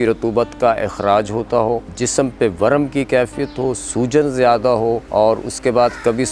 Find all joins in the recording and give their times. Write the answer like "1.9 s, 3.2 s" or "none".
1.9 s, 5.0 s